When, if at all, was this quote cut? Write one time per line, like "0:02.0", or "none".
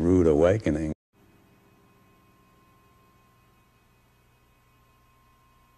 none